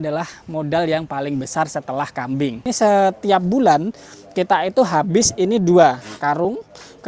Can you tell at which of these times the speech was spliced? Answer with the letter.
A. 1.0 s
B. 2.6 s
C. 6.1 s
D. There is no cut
B